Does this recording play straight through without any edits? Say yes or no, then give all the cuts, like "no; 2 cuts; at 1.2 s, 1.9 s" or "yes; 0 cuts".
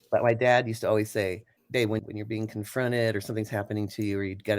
no; 1 cut; at 2.0 s